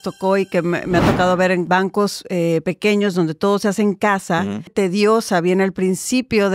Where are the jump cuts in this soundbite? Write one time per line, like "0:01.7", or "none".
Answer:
0:01.7
0:04.7